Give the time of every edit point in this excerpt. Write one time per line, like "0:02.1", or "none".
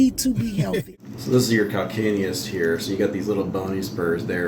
0:00.9